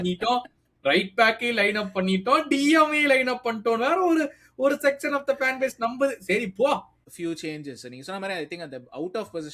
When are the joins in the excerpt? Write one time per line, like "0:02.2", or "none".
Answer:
0:07.0